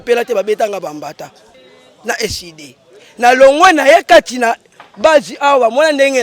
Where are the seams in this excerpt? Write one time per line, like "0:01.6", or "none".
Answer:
0:01.6